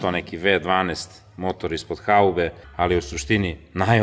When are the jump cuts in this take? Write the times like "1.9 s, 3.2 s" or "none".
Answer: 2.6 s